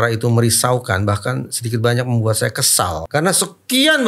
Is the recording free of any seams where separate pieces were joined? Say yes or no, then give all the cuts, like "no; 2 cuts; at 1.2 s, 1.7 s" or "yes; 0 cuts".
no; 1 cut; at 3.0 s